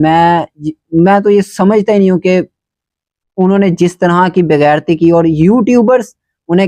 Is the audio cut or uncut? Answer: uncut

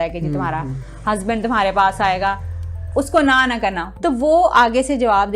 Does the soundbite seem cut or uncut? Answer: cut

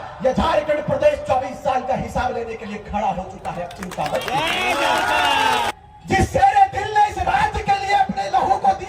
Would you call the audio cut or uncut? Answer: cut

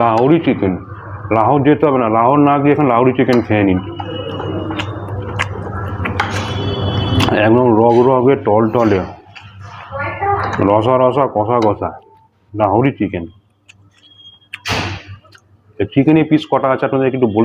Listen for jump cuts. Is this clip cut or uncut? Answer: uncut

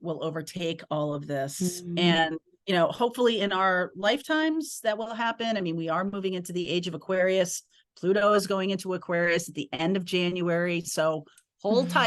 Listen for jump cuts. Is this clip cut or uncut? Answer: cut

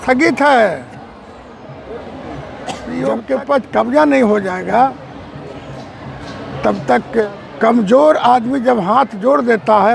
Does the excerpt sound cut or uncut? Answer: cut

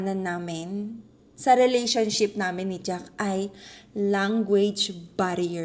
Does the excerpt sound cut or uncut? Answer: uncut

